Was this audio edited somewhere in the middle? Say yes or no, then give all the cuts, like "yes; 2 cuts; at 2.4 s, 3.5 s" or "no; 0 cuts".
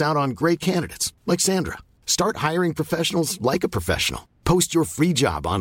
no; 0 cuts